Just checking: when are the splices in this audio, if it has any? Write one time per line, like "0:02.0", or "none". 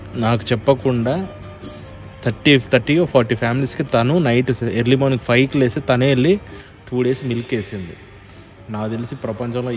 none